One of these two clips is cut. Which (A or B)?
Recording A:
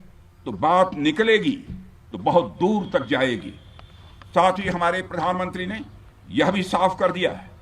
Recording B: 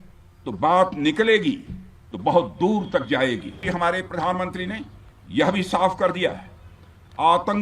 B